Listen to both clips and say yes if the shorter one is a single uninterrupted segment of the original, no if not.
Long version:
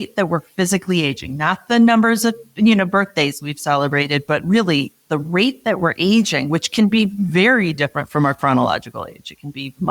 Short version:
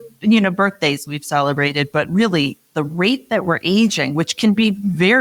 yes